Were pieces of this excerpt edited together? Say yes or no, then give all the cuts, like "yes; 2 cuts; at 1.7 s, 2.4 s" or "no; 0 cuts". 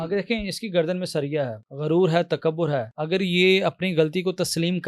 yes; 2 cuts; at 1.6 s, 2.9 s